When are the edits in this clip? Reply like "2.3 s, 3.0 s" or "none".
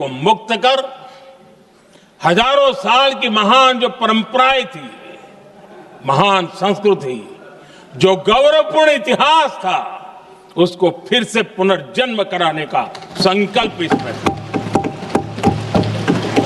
none